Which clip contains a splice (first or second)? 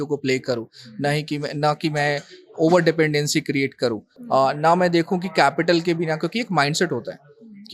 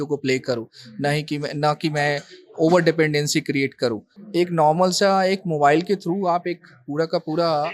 second